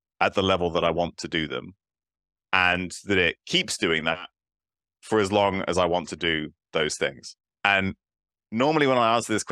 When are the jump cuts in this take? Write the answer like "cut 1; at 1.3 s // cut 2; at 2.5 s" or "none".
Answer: none